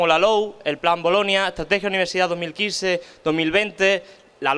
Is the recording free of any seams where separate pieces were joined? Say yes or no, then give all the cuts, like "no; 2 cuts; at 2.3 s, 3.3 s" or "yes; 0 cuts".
no; 1 cut; at 3.1 s